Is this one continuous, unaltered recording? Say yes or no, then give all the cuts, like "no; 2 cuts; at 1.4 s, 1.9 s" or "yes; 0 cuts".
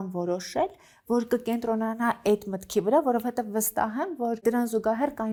yes; 0 cuts